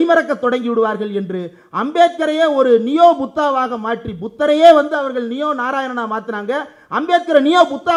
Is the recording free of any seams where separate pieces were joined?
yes; 0 cuts

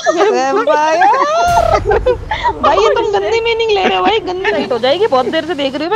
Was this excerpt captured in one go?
no; 1 cut; at 4.6 s

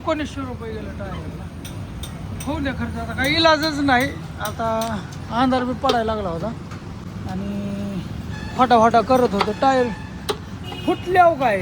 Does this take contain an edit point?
no; 0 cuts

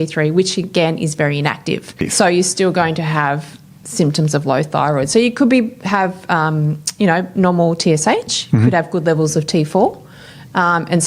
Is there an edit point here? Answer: yes; 1 cut; at 1.9 s

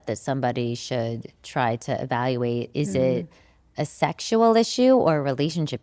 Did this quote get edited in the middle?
no; 0 cuts

